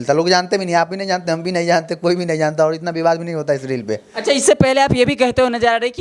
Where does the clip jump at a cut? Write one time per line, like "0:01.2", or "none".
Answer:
none